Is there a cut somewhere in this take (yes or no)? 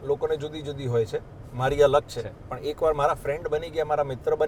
no